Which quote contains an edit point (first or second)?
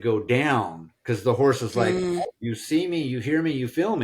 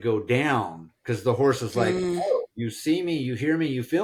first